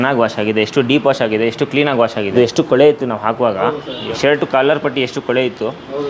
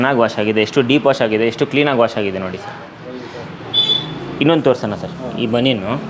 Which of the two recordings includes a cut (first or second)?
first